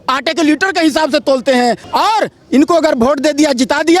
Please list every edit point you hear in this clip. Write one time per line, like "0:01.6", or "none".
0:01.8